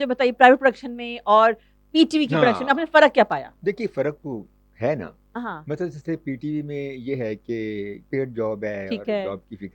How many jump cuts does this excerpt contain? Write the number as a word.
zero